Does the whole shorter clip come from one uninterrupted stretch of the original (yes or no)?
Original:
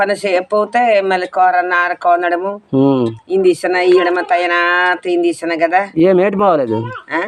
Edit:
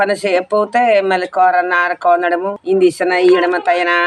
no